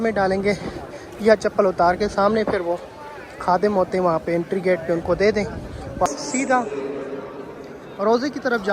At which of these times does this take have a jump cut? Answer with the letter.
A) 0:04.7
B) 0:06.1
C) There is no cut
B